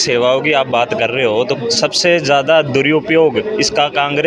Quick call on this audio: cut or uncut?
uncut